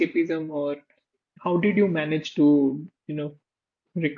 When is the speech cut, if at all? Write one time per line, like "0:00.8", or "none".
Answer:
none

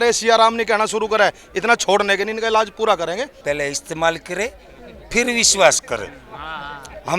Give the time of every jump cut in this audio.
0:03.4

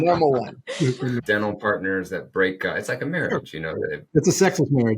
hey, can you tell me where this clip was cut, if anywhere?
0:01.2
0:04.0

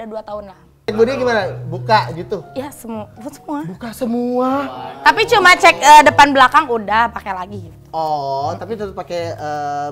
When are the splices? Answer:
0:00.9

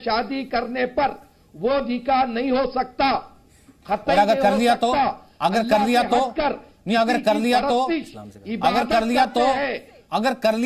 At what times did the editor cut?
none

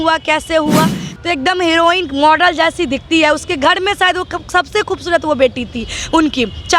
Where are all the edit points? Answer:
0:01.1

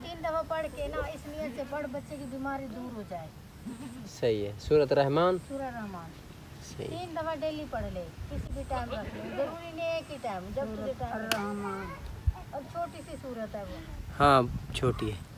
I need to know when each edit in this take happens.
none

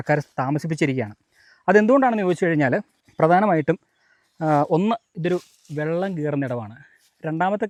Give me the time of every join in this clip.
none

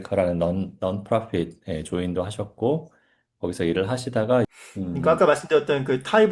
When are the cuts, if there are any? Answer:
0:04.5

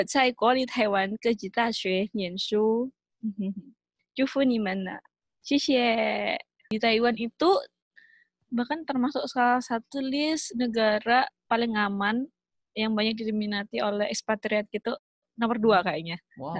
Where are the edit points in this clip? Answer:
0:06.6

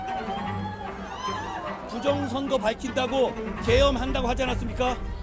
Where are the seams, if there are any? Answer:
none

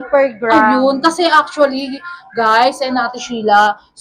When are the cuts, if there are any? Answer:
none

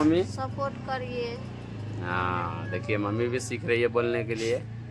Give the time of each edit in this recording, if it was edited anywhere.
none

